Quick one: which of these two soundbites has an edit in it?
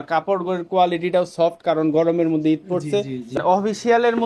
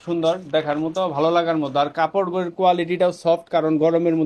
first; 1 cut; at 3.3 s

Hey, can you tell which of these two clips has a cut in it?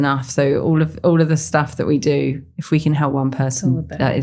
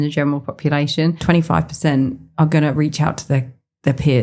second; 1 cut; at 1.2 s

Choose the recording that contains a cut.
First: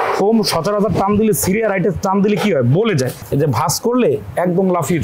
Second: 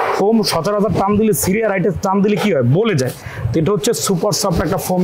first; 1 cut; at 3.2 s

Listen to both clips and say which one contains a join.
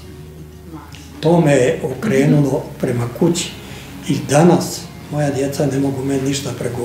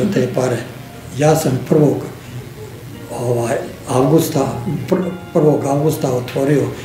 second; 1 cut; at 1.0 s

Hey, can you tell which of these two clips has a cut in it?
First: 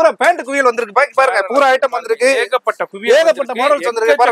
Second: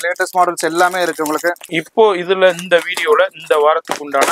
second; 1 cut; at 1.8 s

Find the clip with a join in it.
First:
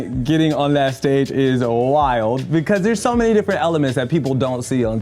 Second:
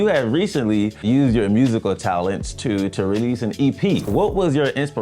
second; 2 cuts; at 1.0 s, 4.1 s

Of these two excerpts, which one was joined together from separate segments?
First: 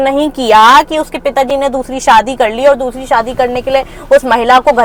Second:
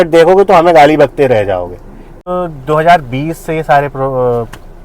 second; 1 cut; at 2.2 s

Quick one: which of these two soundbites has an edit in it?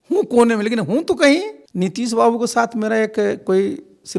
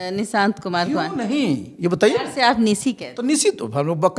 first; 1 cut; at 1.6 s

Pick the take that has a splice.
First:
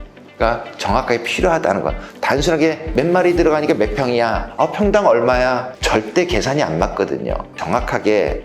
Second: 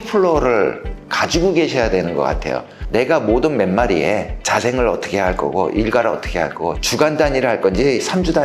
first; 4 cuts; at 2.8 s, 4.4 s, 5.7 s, 7.6 s

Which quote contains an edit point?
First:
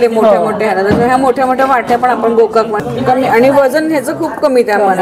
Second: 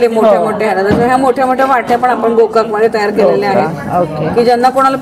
first; 1 cut; at 2.8 s

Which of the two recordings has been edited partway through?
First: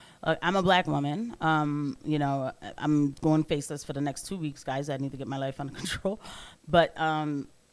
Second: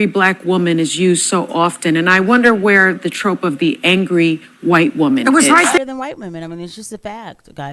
second; 1 cut; at 5.8 s

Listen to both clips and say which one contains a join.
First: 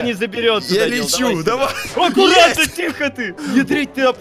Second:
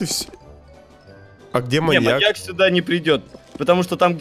first; 1 cut; at 3.3 s

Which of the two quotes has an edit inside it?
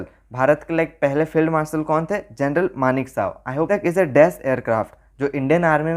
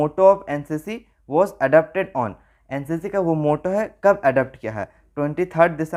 first; 1 cut; at 3.7 s

